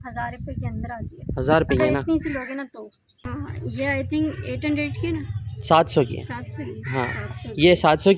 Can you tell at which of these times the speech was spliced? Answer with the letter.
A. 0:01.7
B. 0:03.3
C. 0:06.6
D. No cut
B